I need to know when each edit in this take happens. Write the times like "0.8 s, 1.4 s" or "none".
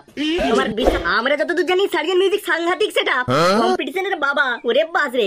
0.9 s

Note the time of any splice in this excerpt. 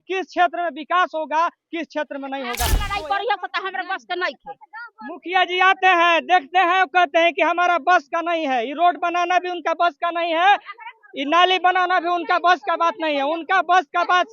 2.8 s

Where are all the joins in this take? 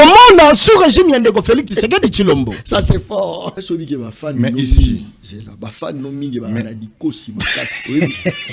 3.5 s

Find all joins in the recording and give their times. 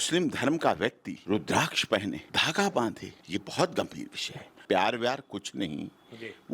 1.1 s, 2.3 s, 3.1 s, 4.6 s

